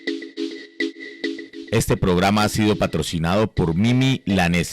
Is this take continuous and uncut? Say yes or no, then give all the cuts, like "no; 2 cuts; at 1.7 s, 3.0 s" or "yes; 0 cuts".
no; 1 cut; at 1.1 s